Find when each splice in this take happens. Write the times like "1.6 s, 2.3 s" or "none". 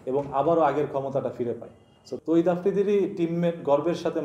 1.9 s